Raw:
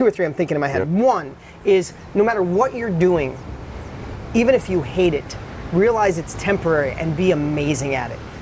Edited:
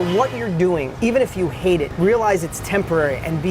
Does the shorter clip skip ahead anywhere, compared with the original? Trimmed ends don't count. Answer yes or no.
yes